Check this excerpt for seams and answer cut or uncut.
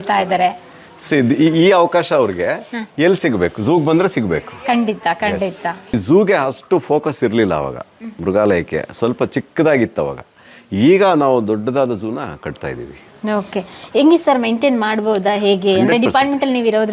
cut